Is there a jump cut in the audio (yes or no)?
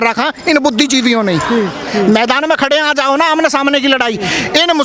yes